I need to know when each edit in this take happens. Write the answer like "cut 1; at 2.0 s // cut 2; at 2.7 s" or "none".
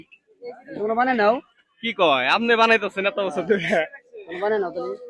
cut 1; at 1.5 s